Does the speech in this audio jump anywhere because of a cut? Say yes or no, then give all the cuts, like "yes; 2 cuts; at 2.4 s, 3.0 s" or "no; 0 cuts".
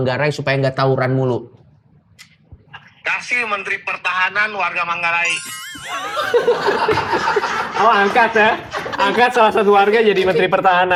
no; 0 cuts